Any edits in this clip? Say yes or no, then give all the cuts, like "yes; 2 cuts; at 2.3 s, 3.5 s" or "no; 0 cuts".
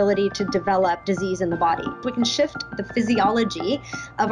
yes; 2 cuts; at 1.0 s, 1.9 s